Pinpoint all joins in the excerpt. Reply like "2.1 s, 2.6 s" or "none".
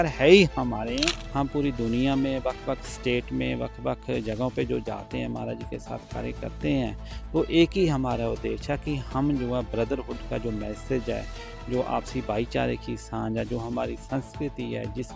1.2 s